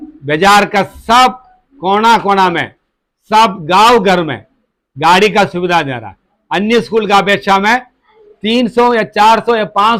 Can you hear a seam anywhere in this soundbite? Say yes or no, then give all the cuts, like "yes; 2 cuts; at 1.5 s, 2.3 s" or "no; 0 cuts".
no; 0 cuts